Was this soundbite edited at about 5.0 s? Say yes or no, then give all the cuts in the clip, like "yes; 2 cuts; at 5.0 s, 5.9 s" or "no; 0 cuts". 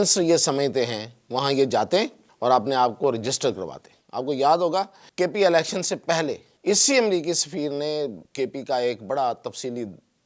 yes; 4 cuts; at 2.2 s, 5.0 s, 6.5 s, 8.2 s